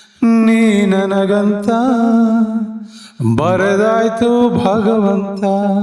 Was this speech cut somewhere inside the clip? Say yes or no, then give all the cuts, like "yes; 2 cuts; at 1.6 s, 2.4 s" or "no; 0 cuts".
no; 0 cuts